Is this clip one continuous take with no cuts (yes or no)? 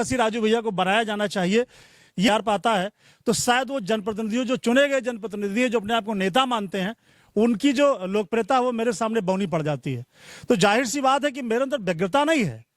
no